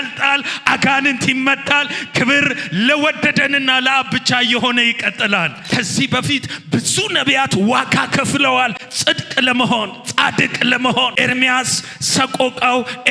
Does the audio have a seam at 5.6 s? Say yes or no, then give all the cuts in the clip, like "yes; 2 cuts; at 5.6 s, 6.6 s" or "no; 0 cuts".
yes; 2 cuts; at 5.6 s, 11.1 s